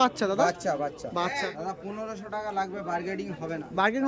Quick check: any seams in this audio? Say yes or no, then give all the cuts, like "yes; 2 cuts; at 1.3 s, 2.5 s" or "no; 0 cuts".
yes; 1 cut; at 1.5 s